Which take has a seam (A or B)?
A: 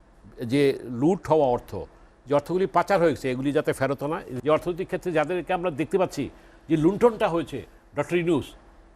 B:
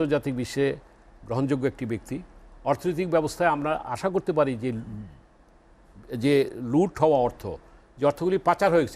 A